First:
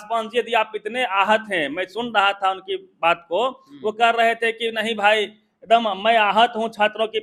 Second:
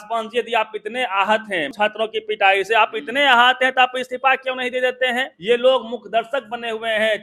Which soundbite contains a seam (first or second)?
second